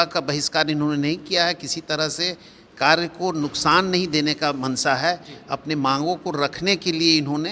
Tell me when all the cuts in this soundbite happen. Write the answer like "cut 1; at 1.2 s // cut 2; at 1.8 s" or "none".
none